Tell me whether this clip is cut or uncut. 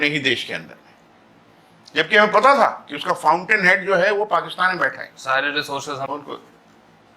cut